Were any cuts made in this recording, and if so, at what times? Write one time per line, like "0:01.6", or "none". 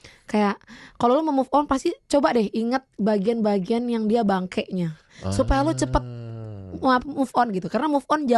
none

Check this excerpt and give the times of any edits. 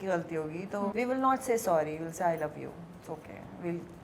0:00.9

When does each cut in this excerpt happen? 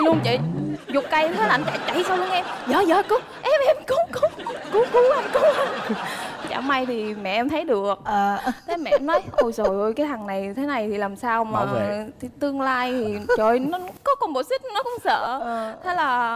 none

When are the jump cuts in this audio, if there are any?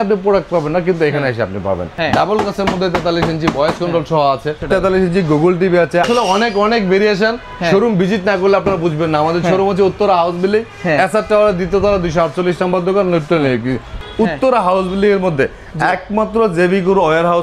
0:01.9
0:04.6
0:06.1
0:14.0

